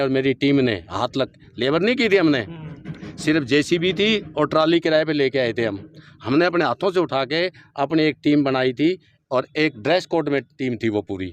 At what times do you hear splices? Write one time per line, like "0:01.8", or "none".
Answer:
none

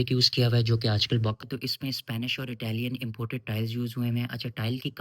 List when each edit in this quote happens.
0:01.4

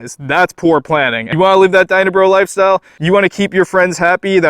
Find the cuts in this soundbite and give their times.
0:01.2

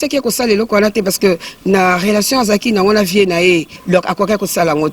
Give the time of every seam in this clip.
0:03.7

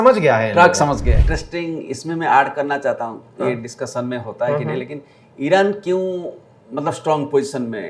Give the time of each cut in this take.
0:01.3

